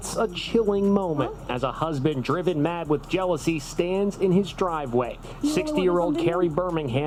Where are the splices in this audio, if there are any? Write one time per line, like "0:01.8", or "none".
none